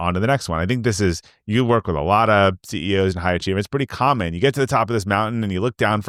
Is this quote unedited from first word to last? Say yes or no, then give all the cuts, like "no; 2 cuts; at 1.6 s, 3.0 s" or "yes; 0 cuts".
yes; 0 cuts